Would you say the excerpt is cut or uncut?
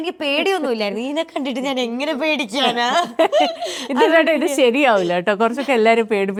uncut